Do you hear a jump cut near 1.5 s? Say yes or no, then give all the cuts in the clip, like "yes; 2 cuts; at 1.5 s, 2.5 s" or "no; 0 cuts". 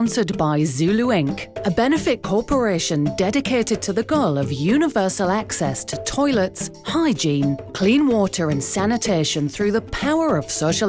no; 0 cuts